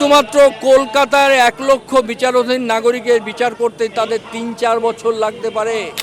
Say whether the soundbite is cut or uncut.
uncut